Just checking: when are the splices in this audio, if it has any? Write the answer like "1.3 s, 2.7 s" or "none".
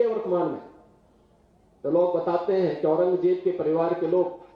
3.1 s